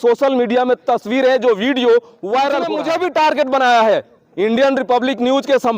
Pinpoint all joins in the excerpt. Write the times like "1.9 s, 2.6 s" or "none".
2.8 s

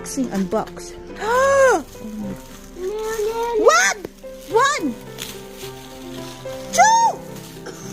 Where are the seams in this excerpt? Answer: none

